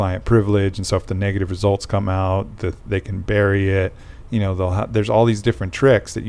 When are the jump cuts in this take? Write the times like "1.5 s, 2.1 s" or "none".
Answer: none